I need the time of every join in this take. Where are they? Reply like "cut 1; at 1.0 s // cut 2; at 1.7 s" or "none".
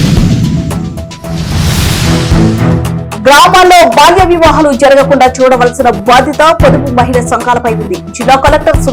cut 1; at 3.1 s